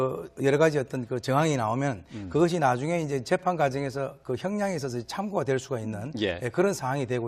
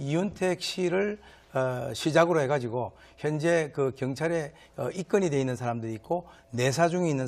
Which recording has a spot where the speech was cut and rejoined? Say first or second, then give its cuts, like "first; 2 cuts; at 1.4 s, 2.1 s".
second; 1 cut; at 5.0 s